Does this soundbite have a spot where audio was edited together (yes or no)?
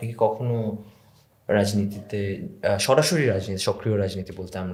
no